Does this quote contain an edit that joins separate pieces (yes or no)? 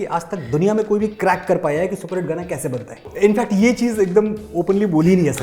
yes